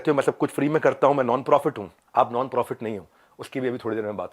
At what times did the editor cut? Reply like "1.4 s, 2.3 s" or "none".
1.9 s